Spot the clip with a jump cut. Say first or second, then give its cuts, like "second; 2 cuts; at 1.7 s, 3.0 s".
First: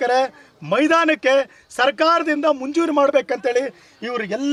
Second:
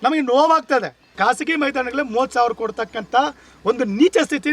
second; 1 cut; at 1.0 s